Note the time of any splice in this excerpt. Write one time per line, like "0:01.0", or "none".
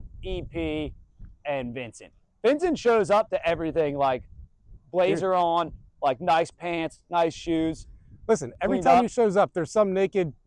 none